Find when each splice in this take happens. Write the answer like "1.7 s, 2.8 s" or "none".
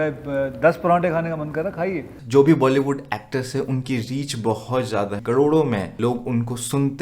2.2 s, 5.2 s, 5.9 s

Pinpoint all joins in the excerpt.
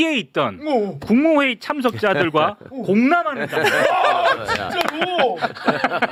none

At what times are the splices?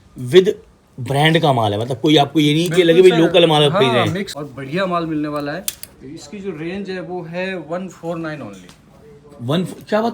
4.3 s

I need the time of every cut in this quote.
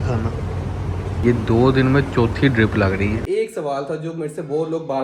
1.2 s, 3.2 s

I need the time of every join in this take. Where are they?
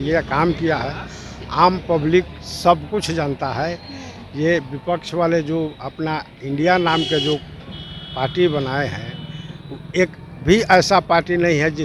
none

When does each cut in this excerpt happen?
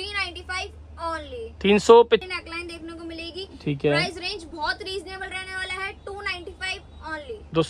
2.2 s

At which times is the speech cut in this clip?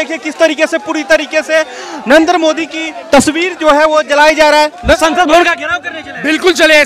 5.0 s

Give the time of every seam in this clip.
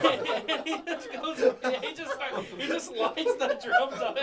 none

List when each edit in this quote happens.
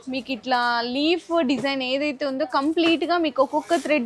none

